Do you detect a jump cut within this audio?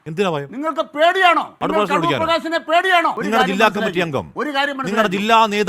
yes; 2 cuts; at 1.5 s, 3.2 s

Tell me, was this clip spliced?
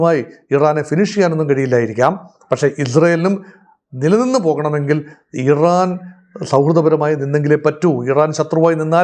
no; 0 cuts

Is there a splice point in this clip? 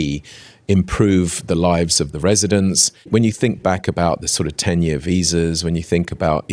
yes; 1 cut; at 3.1 s

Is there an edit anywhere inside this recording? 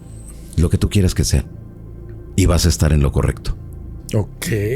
no; 0 cuts

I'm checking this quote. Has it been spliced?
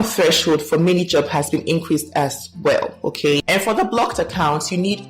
yes; 1 cut; at 3.4 s

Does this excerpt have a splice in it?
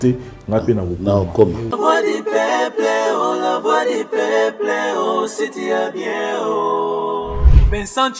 yes; 1 cut; at 1.6 s

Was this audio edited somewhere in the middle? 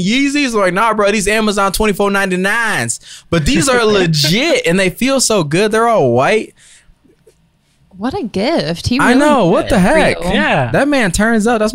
no; 0 cuts

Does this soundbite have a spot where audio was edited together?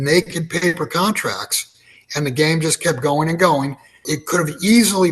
yes; 1 cut; at 4.1 s

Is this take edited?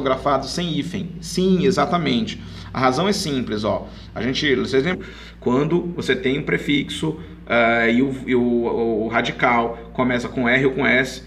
no; 0 cuts

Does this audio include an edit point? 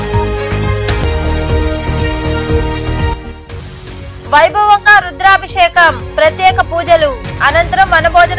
no; 0 cuts

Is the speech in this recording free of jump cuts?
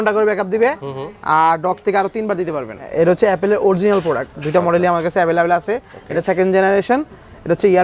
no; 1 cut; at 2.8 s

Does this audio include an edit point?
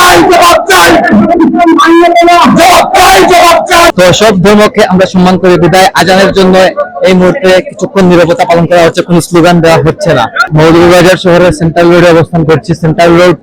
yes; 2 cuts; at 3.9 s, 10.5 s

